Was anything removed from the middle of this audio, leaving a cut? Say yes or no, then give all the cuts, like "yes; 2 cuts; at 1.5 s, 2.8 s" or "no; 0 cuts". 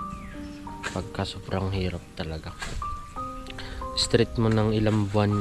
no; 0 cuts